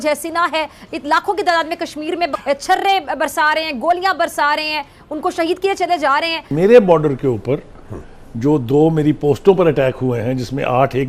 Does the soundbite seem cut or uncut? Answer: cut